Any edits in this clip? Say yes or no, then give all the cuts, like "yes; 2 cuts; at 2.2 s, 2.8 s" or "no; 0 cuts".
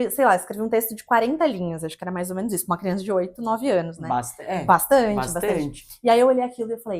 no; 0 cuts